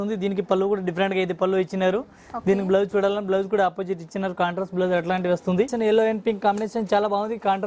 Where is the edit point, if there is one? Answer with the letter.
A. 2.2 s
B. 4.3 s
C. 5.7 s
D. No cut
C